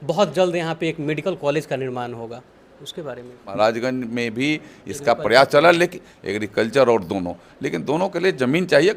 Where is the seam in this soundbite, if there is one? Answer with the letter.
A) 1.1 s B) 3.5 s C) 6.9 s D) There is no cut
B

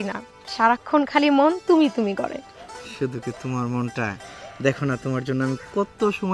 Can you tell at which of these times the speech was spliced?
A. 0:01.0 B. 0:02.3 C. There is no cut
C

